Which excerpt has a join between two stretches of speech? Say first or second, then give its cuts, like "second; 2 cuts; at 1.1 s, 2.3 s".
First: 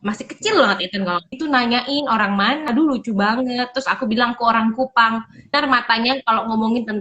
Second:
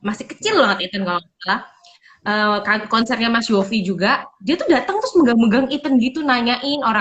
first; 3 cuts; at 1.4 s, 2.7 s, 5.6 s